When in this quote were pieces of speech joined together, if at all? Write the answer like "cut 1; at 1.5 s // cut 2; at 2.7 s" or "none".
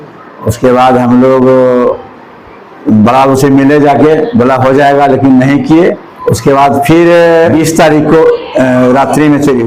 cut 1; at 6.1 s // cut 2; at 7.5 s